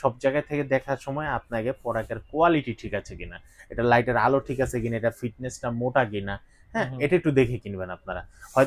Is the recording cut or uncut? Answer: uncut